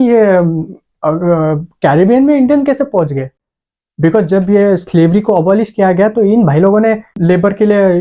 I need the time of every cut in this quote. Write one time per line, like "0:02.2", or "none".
none